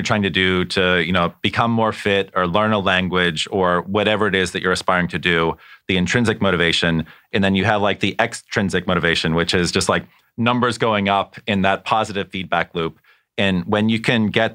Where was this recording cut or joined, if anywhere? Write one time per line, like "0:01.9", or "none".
none